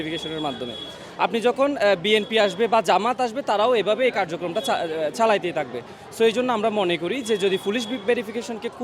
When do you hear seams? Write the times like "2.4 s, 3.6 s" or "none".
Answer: none